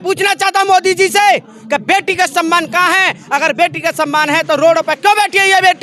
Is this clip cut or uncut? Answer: uncut